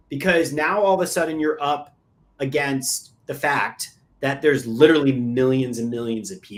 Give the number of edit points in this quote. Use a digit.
0